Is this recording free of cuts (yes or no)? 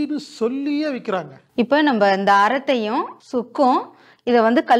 no